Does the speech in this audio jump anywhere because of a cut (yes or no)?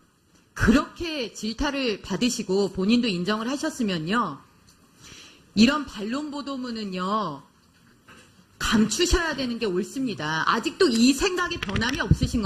yes